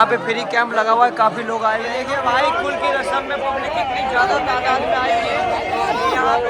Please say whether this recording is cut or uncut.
cut